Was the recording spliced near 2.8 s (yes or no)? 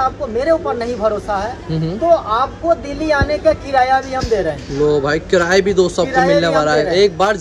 no